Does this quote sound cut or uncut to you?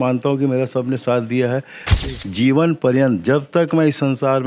cut